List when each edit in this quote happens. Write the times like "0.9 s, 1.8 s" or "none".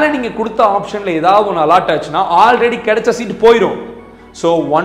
none